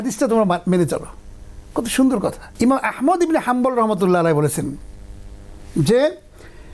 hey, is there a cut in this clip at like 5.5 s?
no; 1 cut; at 2.4 s

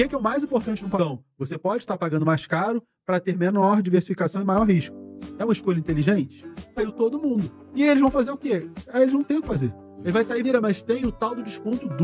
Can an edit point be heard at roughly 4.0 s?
no; 3 cuts; at 1.0 s, 6.8 s, 10.4 s

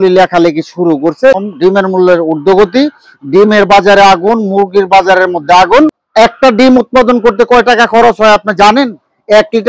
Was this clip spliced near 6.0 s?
yes; 2 cuts; at 1.4 s, 6.0 s

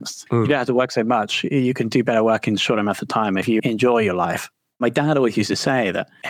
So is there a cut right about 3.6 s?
yes; 2 cuts; at 3.6 s, 4.8 s

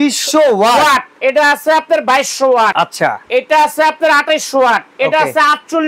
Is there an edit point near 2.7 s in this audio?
yes; 1 cut; at 2.7 s

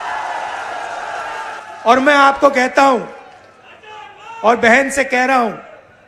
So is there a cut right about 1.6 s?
yes; 1 cut; at 1.6 s

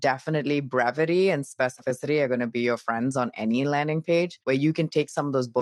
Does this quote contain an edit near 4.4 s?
yes; 1 cut; at 4.4 s

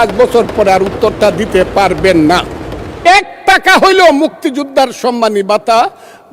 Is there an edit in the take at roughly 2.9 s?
yes; 1 cut; at 2.9 s

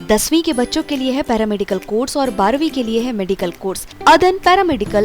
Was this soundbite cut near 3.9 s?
yes; 1 cut; at 3.9 s

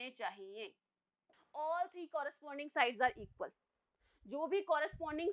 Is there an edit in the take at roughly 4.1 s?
no; 1 cut; at 1.4 s

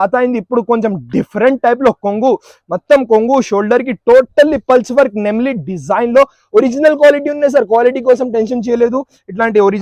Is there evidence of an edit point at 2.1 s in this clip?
no; 0 cuts

